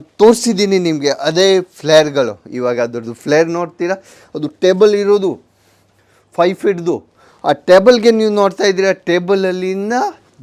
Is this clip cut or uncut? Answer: uncut